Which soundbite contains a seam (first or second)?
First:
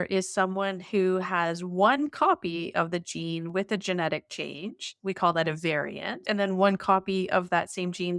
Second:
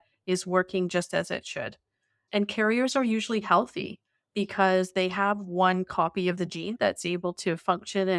first